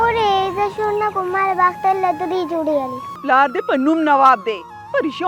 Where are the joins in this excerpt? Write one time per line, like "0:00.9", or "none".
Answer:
0:03.1

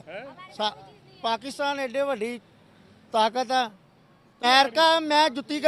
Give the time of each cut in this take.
0:04.4

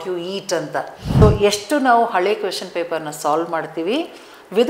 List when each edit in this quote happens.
0:01.2

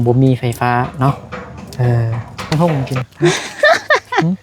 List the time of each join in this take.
0:02.5

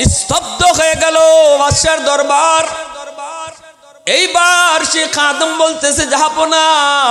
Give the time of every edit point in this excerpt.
none

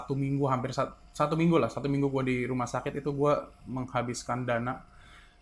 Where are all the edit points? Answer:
none

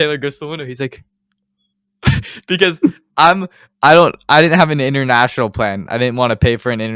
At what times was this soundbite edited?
none

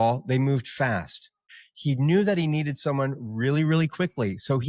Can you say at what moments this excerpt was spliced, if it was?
0:01.5

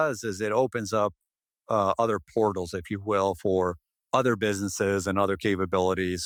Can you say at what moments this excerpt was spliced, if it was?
none

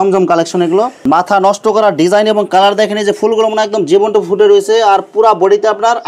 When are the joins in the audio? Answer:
0:01.0

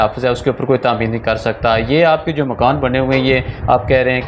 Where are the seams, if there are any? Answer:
none

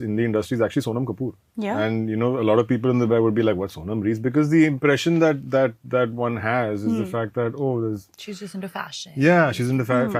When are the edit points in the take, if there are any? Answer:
none

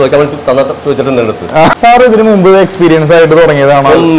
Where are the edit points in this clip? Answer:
0:01.8

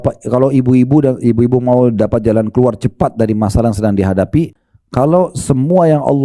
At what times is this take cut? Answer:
0:04.6

